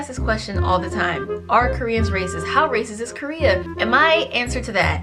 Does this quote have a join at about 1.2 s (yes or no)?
no